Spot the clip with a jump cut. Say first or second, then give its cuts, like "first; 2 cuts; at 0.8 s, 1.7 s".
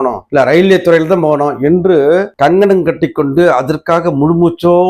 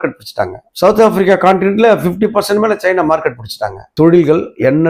second; 1 cut; at 3.8 s